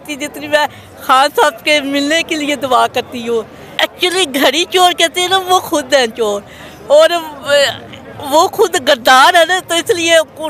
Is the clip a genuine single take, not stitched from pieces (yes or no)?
no